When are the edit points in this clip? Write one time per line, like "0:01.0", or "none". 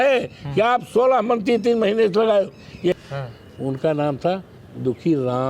0:03.0